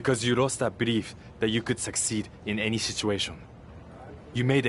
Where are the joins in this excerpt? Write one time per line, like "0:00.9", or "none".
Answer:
none